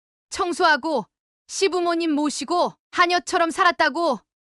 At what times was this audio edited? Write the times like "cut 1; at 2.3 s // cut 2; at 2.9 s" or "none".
none